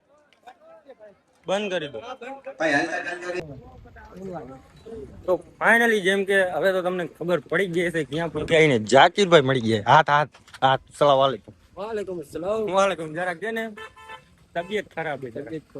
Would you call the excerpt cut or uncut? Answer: cut